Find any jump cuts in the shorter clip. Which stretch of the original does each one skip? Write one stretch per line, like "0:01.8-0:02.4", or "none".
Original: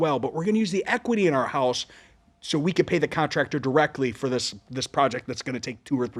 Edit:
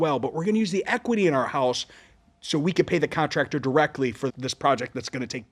0:04.3-0:04.6